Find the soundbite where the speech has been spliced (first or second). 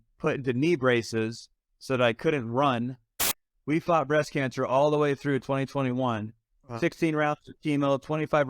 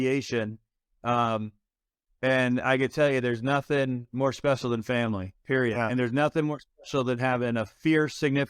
first